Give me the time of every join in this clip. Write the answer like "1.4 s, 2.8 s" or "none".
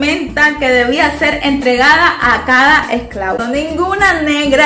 3.4 s